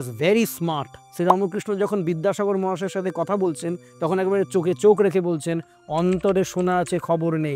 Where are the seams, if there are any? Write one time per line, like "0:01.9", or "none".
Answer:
0:01.0